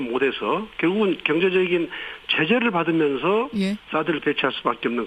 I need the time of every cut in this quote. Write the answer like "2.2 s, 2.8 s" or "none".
2.6 s